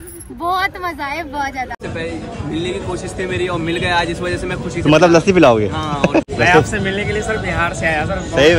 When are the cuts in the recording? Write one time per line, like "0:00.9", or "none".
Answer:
0:01.8
0:06.3

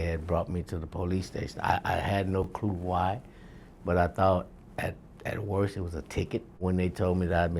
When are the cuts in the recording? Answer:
0:06.6

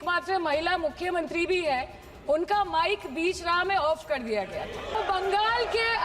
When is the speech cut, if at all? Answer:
0:05.0

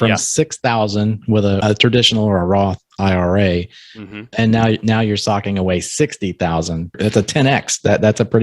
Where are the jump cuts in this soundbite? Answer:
0:01.6
0:07.0

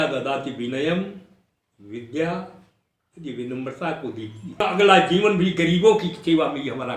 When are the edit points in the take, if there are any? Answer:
0:04.6
0:05.7

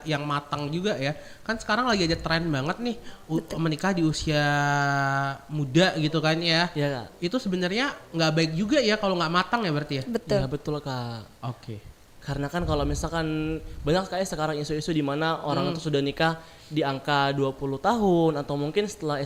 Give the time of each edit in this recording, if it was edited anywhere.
none

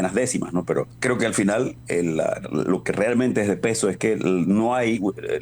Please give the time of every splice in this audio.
0:00.9
0:01.8

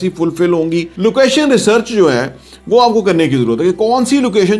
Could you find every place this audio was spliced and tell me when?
0:00.9

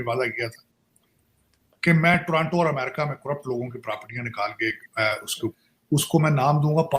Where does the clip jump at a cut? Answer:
0:05.5

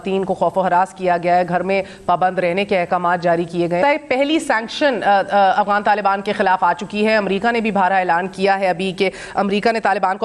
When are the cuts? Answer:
0:03.8

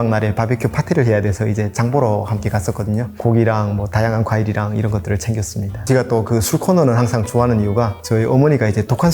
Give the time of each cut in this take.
0:03.1
0:05.8
0:08.0

